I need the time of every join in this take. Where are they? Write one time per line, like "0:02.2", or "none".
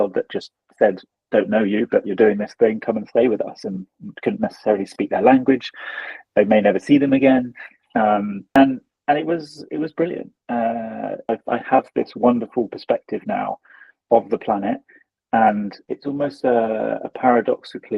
0:11.3
0:15.8